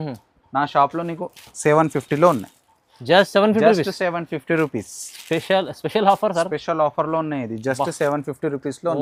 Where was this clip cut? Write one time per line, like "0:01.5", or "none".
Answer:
none